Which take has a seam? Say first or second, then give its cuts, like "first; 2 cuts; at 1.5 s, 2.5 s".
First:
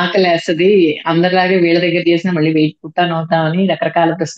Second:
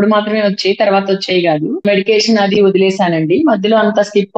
second; 1 cut; at 1.8 s